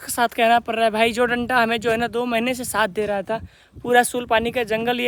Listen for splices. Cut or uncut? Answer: uncut